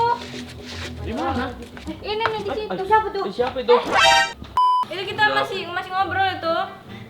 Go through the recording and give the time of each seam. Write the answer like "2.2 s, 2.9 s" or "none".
4.5 s